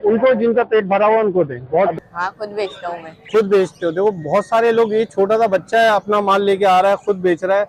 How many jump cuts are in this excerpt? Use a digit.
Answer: 1